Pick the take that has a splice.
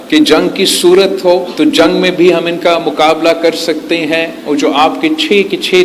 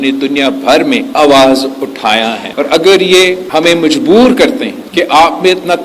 second; 2 cuts; at 2.4 s, 4.8 s

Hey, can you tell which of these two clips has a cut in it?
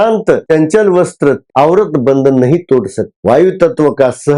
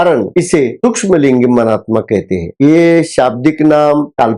first; 1 cut; at 1.4 s

